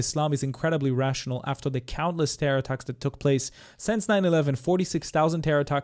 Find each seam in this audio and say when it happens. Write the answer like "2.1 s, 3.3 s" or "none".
none